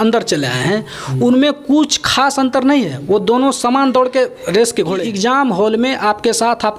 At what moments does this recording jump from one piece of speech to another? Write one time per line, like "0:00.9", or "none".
0:05.0